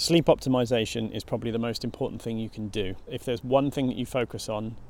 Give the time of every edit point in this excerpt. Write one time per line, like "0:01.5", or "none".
0:03.1